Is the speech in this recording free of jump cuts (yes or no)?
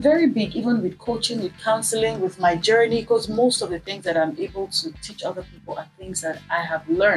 yes